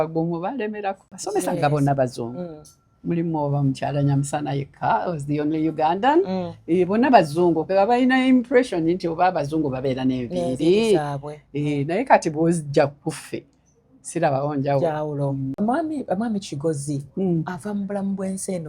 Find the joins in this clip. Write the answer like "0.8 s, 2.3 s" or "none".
1.1 s, 15.5 s